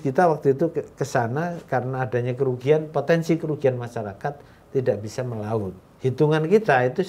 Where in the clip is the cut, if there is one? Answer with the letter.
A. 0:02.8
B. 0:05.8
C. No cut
B